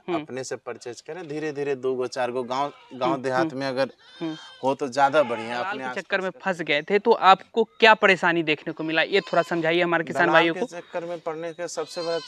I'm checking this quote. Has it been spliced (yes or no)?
yes